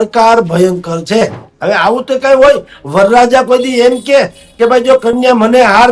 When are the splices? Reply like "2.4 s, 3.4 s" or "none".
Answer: 1.5 s